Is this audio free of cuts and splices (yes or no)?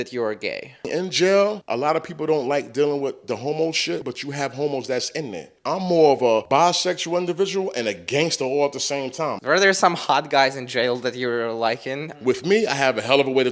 no